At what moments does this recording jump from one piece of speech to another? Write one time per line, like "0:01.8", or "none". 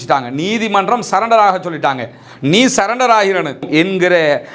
0:03.7